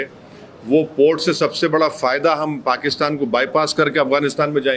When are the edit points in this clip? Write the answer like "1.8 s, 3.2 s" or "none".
none